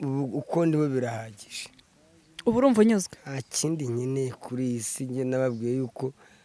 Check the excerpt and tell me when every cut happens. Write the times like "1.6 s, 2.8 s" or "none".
none